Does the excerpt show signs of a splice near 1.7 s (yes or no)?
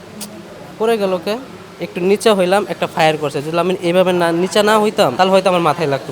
no